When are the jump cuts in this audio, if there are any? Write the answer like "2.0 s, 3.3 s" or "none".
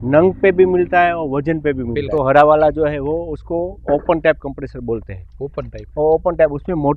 2.0 s